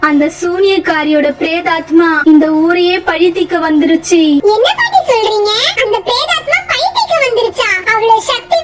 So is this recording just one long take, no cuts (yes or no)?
yes